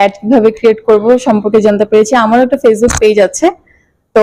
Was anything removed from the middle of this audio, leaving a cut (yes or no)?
no